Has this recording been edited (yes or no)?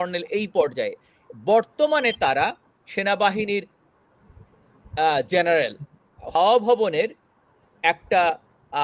yes